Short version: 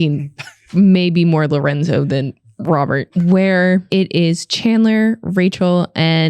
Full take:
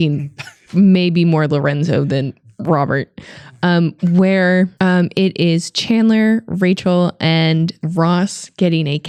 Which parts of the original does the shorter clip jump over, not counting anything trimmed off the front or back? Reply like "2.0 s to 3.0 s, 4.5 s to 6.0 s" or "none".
3.1 s to 3.9 s, 4.7 s to 5.1 s